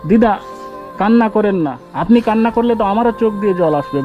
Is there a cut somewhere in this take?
yes; 1 cut; at 1.9 s

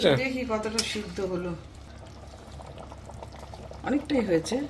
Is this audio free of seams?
no; 1 cut; at 1.9 s

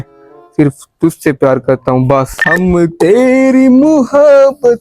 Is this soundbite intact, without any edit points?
no; 1 cut; at 2.3 s

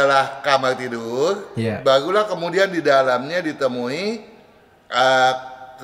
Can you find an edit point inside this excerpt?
no; 0 cuts

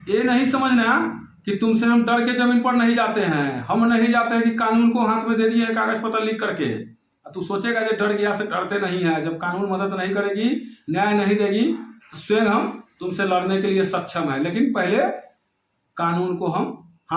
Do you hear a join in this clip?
no; 0 cuts

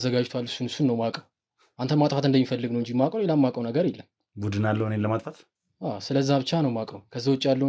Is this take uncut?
yes; 0 cuts

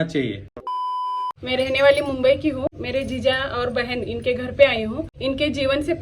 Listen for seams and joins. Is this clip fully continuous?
no; 3 cuts; at 1.0 s, 2.7 s, 5.1 s

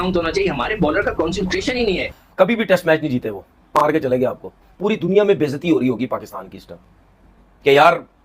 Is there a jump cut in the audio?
yes; 1 cut; at 2.1 s

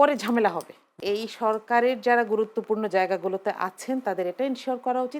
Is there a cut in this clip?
yes; 1 cut; at 0.9 s

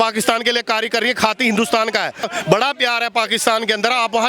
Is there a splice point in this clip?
yes; 1 cut; at 2.3 s

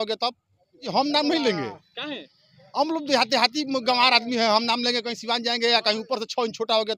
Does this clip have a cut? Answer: yes; 1 cut; at 0.9 s

